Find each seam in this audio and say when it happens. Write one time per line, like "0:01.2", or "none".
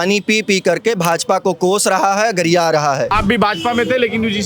0:03.1